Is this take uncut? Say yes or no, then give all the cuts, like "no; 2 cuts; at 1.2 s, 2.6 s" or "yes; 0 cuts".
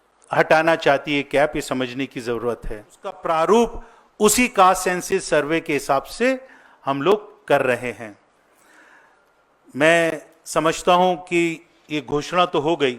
no; 1 cut; at 3.2 s